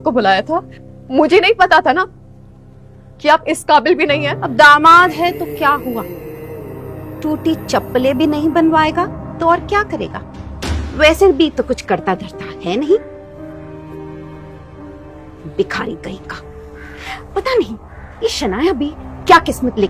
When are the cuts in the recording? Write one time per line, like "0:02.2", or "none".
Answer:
0:04.4